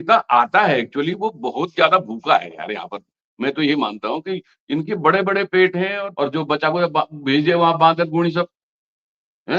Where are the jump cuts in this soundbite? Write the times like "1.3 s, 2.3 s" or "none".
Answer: 6.0 s